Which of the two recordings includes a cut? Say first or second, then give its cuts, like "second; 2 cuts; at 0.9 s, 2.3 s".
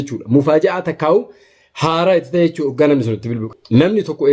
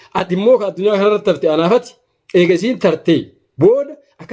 first; 1 cut; at 3.4 s